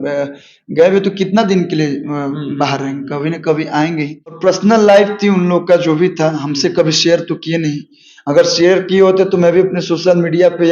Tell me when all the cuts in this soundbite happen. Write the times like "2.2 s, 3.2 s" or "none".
4.4 s